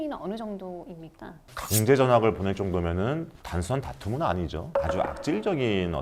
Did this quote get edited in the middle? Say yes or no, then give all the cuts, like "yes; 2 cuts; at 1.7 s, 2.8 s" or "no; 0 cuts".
yes; 2 cuts; at 1.4 s, 4.8 s